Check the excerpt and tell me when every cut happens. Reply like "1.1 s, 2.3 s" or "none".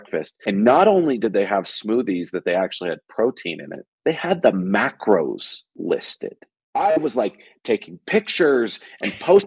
none